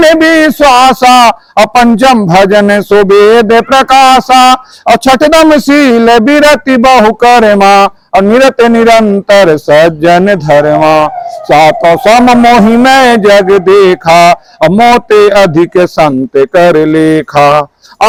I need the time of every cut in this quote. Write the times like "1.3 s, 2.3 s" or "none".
none